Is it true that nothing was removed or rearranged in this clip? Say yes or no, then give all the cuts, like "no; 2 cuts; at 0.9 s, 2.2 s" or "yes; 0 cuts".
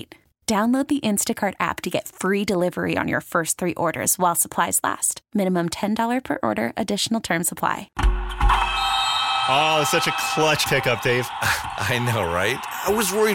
no; 1 cut; at 7.9 s